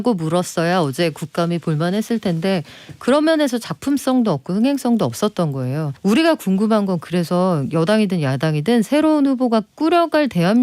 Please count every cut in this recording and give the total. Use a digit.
1